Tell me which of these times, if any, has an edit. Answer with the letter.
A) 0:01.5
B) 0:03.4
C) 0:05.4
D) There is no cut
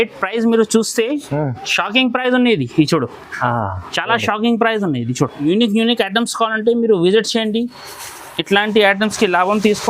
C